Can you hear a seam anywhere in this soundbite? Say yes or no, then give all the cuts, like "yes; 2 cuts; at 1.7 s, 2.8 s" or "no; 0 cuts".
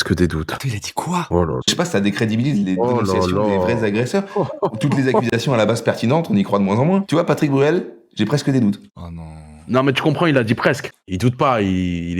no; 0 cuts